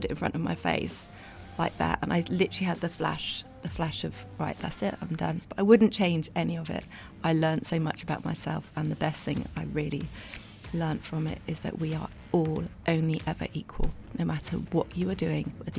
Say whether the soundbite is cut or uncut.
cut